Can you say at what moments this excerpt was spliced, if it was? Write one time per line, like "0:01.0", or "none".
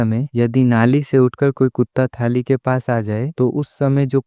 none